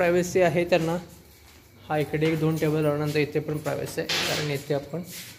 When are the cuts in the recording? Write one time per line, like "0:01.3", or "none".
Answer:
none

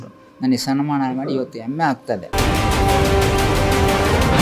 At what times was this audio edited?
0:02.3

